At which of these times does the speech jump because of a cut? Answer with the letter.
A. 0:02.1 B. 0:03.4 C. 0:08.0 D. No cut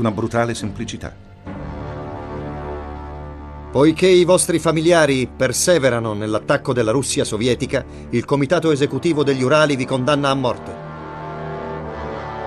C